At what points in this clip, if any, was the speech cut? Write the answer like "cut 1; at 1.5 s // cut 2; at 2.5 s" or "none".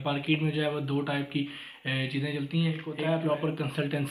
cut 1; at 2.9 s